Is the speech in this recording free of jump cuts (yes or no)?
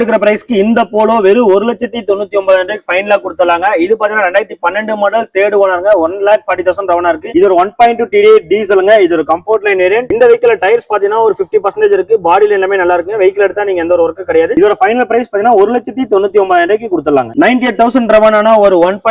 yes